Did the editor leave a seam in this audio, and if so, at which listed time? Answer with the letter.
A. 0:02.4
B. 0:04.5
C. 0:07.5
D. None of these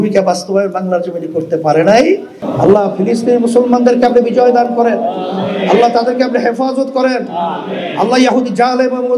A